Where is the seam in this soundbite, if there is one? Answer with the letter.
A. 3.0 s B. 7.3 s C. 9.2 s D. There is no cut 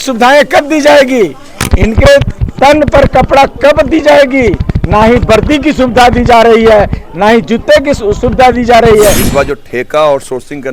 C